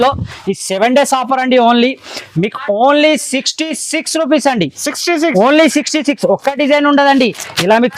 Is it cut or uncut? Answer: uncut